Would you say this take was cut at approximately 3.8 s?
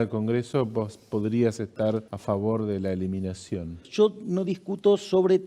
yes; 2 cuts; at 2.1 s, 3.8 s

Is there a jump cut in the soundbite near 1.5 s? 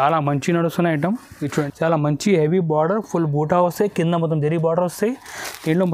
yes; 1 cut; at 1.5 s

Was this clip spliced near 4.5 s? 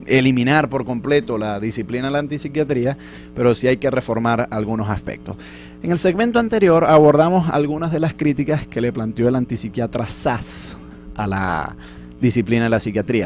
yes; 1 cut; at 4.5 s

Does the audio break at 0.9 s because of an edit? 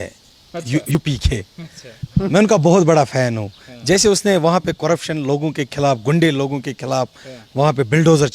yes; 1 cut; at 0.9 s

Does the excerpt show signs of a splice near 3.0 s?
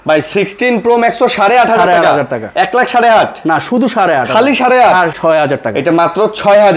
no; 1 cut; at 5.2 s

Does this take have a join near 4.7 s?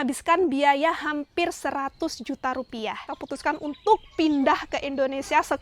no; 1 cut; at 3.1 s

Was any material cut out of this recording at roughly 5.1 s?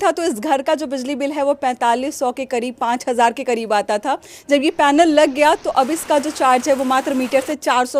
no; 0 cuts

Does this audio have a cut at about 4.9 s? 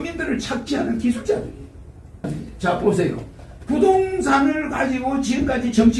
no; 1 cut; at 2.3 s

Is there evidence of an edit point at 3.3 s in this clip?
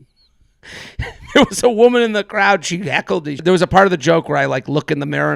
yes; 1 cut; at 3.3 s

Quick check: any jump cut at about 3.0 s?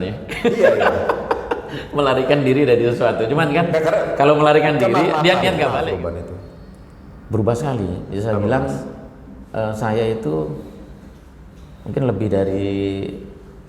no; 1 cut; at 5.8 s

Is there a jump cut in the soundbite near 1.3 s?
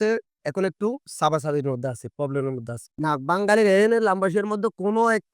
no; 1 cut; at 2.8 s

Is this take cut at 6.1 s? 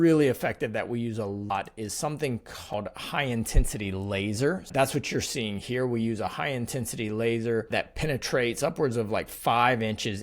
no; 4 cuts; at 1.5 s, 2.7 s, 4.7 s, 7.7 s

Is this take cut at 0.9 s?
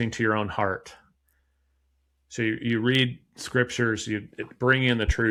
no; 0 cuts

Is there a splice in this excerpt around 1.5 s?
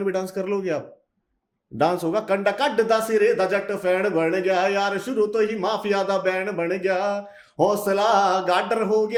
no; 0 cuts

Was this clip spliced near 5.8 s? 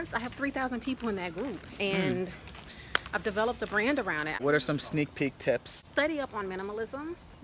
yes; 2 cuts; at 4.4 s, 5.8 s

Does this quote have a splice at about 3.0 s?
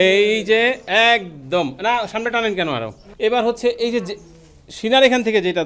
yes; 1 cut; at 3.0 s

